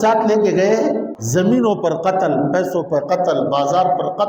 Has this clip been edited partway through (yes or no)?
yes